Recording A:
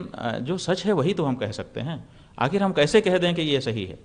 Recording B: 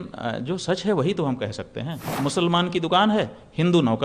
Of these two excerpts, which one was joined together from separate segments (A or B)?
B